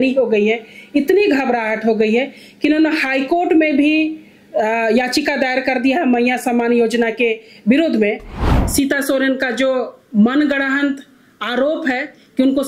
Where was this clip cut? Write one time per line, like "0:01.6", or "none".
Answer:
0:08.3